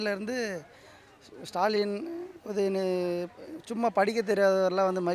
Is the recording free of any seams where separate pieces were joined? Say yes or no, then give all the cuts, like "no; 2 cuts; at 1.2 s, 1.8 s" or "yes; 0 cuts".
yes; 0 cuts